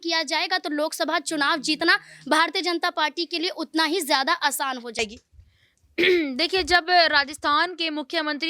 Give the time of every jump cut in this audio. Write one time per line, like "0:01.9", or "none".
0:05.0